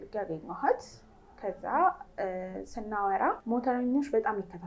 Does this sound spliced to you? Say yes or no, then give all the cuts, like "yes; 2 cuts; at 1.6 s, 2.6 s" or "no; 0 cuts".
yes; 1 cut; at 3.4 s